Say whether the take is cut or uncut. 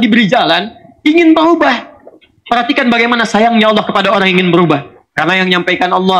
cut